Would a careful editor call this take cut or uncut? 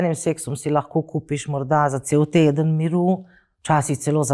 uncut